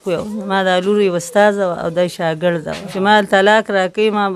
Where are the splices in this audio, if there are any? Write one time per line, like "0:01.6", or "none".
0:02.9